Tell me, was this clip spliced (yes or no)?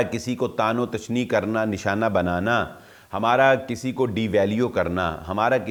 no